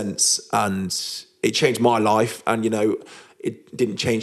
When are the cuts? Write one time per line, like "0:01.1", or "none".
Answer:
none